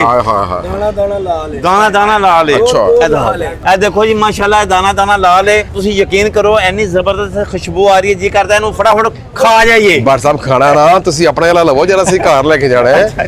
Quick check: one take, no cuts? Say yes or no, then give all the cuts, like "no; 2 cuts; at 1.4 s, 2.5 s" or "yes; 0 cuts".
yes; 0 cuts